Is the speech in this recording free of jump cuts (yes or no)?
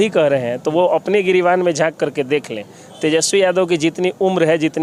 yes